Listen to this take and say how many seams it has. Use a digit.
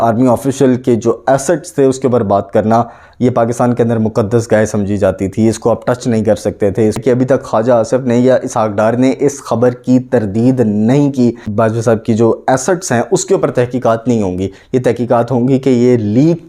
2